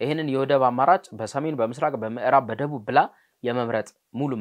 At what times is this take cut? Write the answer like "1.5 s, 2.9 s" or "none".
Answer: none